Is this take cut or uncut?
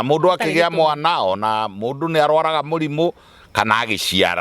uncut